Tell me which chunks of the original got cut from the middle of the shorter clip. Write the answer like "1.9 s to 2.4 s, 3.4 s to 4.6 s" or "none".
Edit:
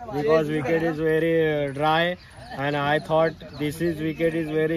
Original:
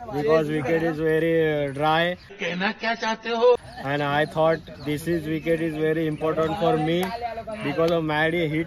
2.4 s to 3.7 s